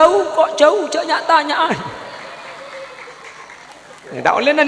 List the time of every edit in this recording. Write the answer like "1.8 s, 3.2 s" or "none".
3.7 s